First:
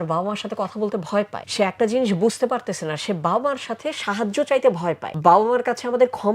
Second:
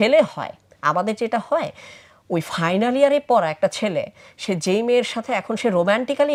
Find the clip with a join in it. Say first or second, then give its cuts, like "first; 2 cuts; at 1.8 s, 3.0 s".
first; 2 cuts; at 1.4 s, 5.1 s